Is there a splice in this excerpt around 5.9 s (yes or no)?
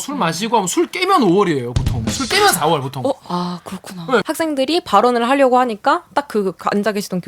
no